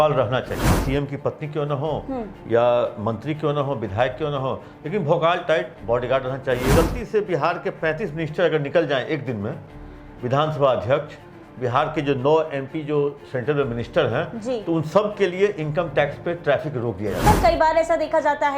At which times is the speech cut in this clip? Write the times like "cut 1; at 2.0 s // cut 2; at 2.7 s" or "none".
cut 1; at 0.8 s // cut 2; at 6.7 s // cut 3; at 17.2 s